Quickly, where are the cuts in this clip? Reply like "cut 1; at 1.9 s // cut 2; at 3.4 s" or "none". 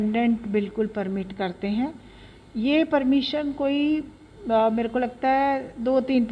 none